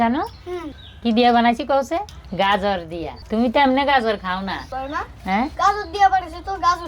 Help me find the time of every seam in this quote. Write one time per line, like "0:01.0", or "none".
0:02.2
0:04.6